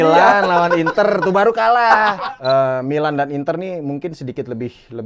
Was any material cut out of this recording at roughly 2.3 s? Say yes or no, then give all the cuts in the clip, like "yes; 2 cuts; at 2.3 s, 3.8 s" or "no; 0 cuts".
yes; 1 cut; at 2.3 s